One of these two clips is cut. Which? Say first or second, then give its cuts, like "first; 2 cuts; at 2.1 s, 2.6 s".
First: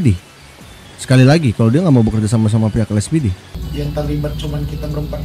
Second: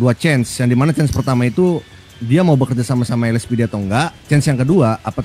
first; 1 cut; at 3.5 s